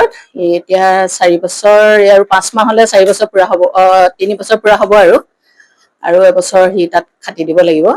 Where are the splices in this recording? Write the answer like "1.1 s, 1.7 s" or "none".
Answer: none